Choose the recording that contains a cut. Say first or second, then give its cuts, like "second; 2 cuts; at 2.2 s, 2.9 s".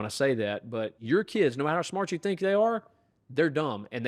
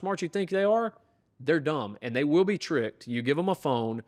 first; 1 cut; at 0.9 s